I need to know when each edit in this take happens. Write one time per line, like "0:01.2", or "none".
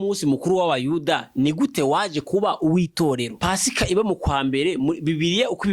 0:03.4